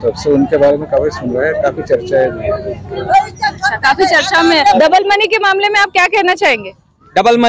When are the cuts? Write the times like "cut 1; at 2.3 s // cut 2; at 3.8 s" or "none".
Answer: cut 1; at 4.8 s